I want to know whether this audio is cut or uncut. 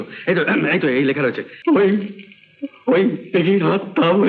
cut